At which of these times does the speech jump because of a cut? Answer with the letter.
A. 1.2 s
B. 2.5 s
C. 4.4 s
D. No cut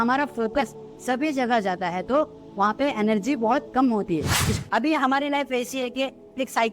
C